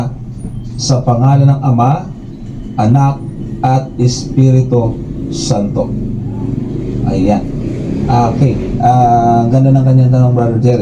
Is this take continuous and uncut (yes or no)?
no